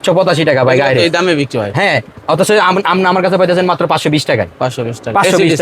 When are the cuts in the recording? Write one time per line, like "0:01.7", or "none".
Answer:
none